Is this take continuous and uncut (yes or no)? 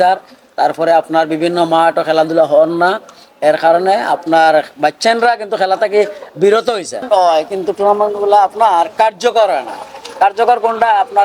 no